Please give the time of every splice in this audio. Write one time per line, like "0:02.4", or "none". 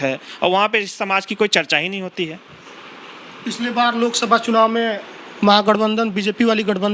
none